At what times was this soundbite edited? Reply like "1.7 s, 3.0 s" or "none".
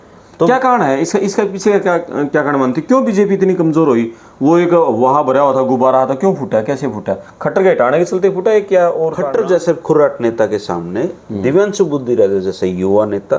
9.2 s